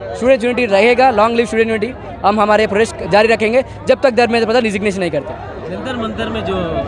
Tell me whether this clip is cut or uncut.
uncut